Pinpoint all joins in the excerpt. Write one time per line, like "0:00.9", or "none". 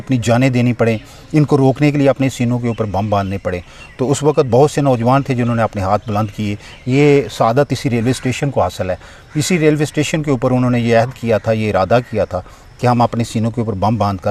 none